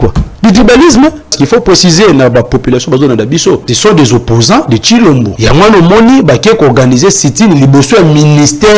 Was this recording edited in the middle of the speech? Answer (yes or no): yes